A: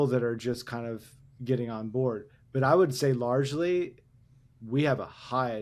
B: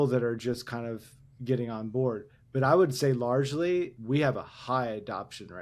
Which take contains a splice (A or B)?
B